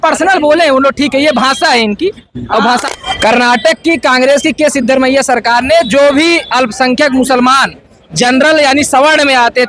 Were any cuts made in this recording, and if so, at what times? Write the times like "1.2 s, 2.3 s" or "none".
2.8 s

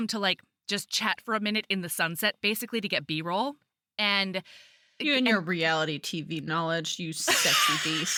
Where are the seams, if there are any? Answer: none

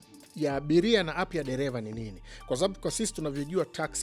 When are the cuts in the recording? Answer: none

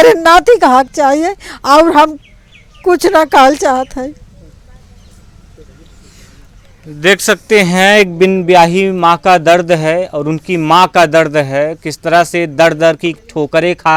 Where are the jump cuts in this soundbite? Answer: none

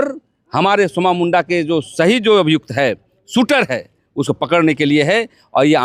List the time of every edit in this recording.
none

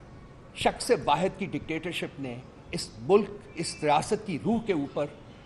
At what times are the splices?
none

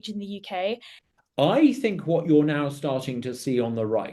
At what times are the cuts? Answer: 1.0 s

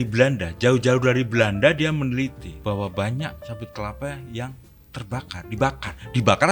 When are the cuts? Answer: 2.5 s

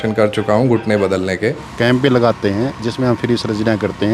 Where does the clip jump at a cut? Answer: 1.7 s

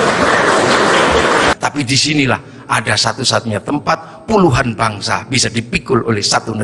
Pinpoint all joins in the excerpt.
1.5 s

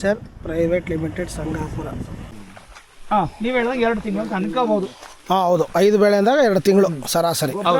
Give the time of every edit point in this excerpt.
2.3 s

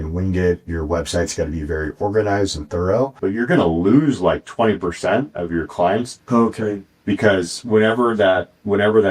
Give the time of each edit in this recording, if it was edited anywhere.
3.2 s, 6.1 s

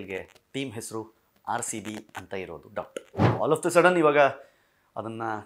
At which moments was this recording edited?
3.2 s

